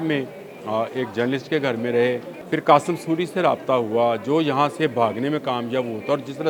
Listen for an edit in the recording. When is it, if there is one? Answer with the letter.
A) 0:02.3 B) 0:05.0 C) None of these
A